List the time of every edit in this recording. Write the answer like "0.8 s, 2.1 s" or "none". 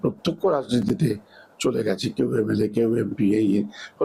none